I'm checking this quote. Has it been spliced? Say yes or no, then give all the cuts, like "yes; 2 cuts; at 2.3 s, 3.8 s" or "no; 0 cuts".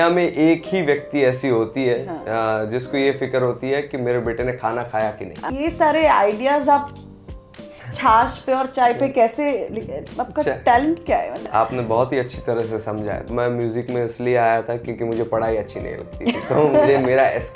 yes; 3 cuts; at 5.5 s, 11.4 s, 13.3 s